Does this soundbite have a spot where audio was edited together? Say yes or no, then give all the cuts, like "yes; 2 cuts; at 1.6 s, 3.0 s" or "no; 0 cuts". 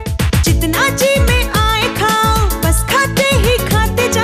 no; 0 cuts